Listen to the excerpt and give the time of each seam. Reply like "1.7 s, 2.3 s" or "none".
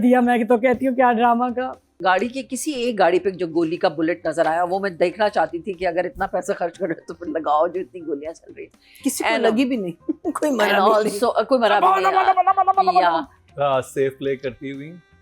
1.9 s, 13.4 s